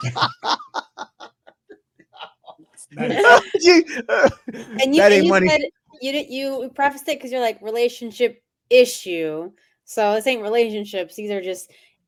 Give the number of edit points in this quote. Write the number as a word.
zero